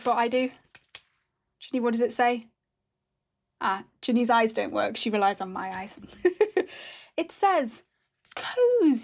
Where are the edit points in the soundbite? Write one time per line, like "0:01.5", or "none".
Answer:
none